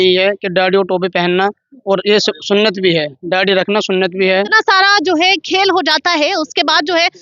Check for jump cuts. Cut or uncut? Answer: cut